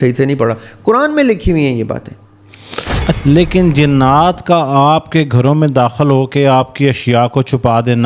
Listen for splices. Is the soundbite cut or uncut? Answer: cut